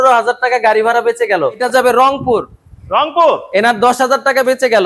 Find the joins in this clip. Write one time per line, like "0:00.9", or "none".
0:01.6